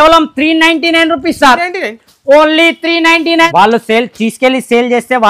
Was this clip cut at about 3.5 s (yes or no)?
yes